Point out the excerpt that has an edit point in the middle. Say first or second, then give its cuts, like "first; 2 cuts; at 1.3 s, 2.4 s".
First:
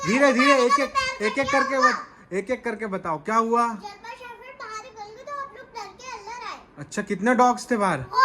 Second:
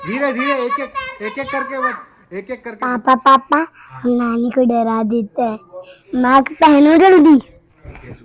second; 1 cut; at 2.8 s